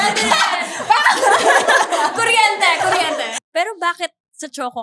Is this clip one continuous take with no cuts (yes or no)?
no